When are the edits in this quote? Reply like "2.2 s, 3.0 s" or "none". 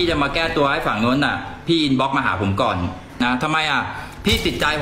3.0 s